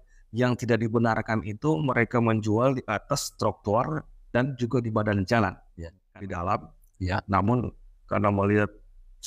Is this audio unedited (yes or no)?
no